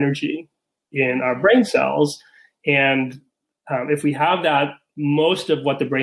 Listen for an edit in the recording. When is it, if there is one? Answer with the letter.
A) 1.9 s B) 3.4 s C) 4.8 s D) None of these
D